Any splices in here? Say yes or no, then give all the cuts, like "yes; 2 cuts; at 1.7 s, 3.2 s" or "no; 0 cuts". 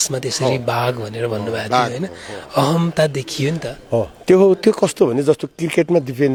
no; 0 cuts